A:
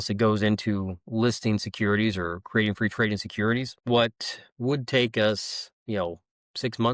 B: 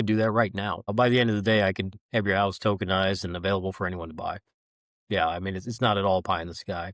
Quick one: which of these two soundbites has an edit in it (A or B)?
B